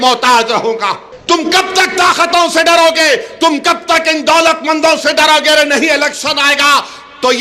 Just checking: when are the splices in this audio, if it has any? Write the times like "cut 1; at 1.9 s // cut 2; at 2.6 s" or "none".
cut 1; at 1.1 s